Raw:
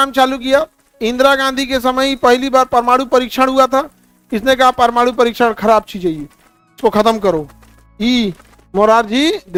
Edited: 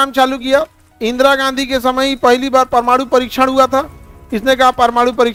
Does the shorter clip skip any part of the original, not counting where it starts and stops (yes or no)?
no